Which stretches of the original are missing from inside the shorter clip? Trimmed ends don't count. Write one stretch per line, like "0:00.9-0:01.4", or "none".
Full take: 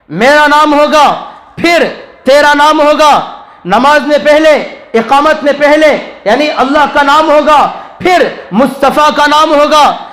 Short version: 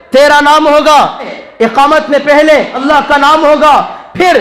0:03.5-0:04.7
0:06.1-0:06.6